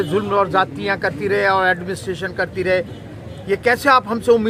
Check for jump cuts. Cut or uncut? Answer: uncut